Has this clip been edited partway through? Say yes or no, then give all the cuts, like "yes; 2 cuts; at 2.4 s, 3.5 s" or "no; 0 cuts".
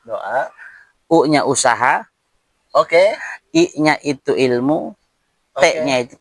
no; 0 cuts